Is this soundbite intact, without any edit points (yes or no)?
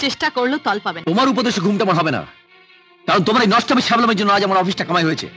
no